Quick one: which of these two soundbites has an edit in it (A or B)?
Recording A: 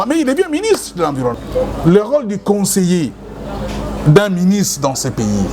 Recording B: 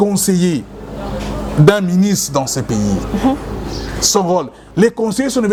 A